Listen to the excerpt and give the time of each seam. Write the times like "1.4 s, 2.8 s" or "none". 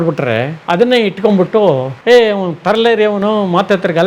1.9 s